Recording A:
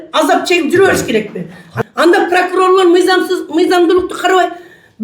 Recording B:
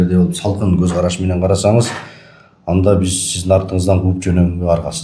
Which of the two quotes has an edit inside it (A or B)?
A